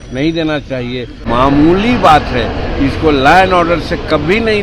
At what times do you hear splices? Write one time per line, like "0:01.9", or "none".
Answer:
0:01.2